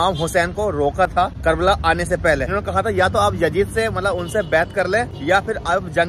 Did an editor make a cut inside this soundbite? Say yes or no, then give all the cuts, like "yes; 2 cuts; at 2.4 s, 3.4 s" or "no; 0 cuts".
yes; 3 cuts; at 1.3 s, 2.5 s, 5.1 s